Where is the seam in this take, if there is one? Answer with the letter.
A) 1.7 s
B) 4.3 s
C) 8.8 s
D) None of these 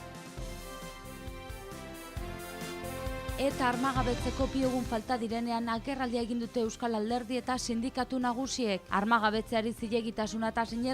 A